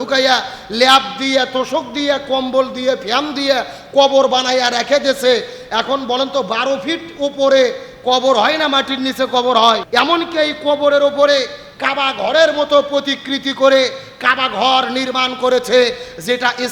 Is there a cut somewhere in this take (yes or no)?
yes